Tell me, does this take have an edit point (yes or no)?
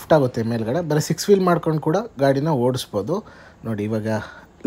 no